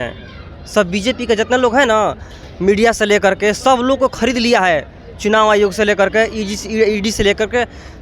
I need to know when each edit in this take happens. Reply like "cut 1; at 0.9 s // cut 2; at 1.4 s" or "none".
none